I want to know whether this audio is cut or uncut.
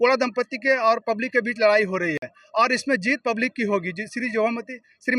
uncut